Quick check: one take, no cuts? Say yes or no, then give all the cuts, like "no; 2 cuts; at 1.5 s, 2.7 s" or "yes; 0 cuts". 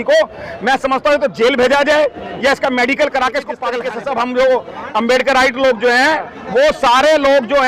no; 1 cut; at 3.8 s